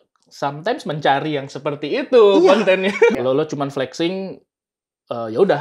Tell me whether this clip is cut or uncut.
cut